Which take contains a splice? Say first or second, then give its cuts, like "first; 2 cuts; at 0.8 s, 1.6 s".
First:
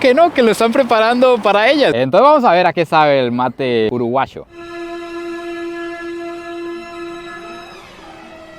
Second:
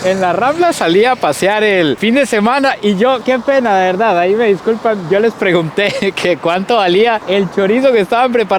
first; 1 cut; at 1.9 s